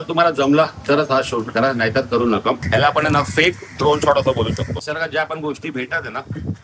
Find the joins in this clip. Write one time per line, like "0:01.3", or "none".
0:02.6
0:04.8

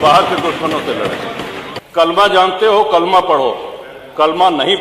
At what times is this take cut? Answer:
0:01.7

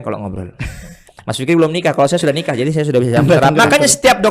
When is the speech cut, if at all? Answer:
0:03.2

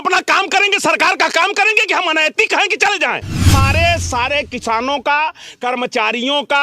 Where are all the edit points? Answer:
0:03.5

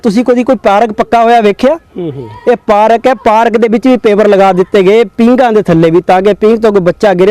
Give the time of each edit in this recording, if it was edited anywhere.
none

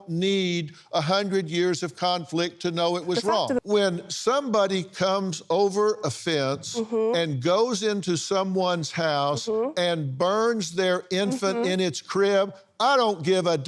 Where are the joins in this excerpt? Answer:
0:03.6

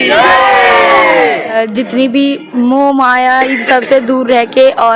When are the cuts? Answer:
0:01.5
0:02.4

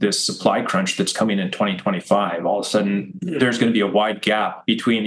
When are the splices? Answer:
none

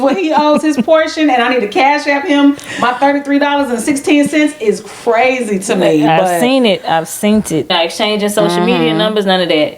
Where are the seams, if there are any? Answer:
0:07.7

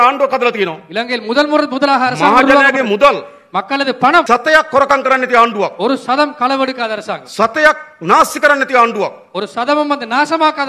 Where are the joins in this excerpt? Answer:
0:04.3

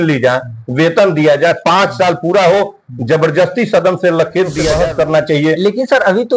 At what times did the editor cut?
0:04.6

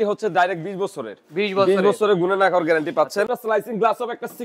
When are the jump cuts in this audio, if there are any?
0:03.3

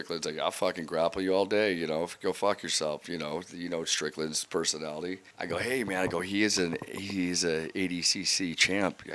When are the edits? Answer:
0:05.3

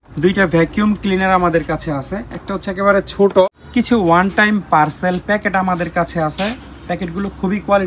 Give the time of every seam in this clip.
0:03.5

